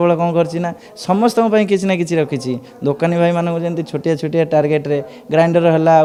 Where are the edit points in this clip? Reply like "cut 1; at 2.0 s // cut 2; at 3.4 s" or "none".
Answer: none